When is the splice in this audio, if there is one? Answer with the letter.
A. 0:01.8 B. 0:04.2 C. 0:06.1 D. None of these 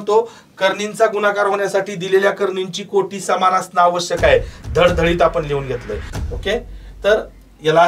C